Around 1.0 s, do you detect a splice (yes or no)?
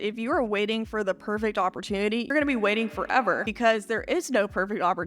no